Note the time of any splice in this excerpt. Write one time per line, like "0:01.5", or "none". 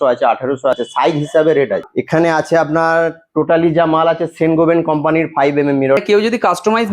0:00.8
0:01.9
0:06.0